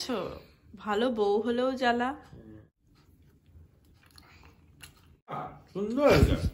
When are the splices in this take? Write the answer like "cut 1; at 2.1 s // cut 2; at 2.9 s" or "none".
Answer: cut 1; at 2.6 s // cut 2; at 5.6 s

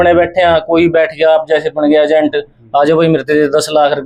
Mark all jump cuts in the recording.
none

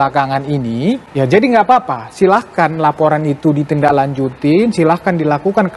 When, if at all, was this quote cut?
cut 1; at 1.1 s

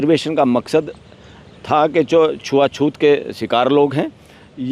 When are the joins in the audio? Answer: none

